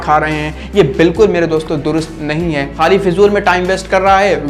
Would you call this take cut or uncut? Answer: cut